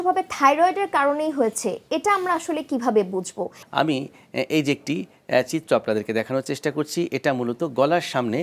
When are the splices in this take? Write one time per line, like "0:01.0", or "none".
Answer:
0:03.6